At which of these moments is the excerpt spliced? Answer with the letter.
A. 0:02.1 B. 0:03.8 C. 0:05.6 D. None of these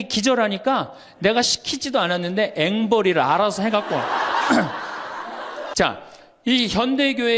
C